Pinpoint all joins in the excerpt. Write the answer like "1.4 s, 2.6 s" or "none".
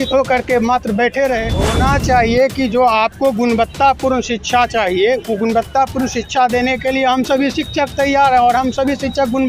1.6 s